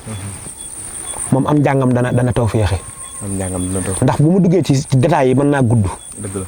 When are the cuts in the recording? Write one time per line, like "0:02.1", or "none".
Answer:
none